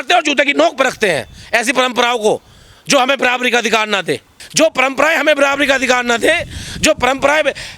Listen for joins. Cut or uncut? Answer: uncut